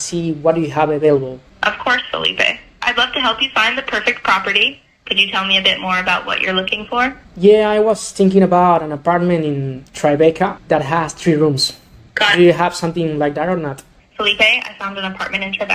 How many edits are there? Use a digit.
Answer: 4